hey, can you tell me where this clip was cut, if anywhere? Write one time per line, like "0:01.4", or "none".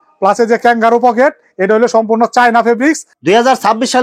0:03.1